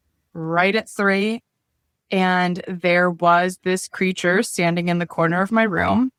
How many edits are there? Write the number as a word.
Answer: zero